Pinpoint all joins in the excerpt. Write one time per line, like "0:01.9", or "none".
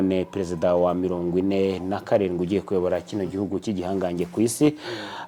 none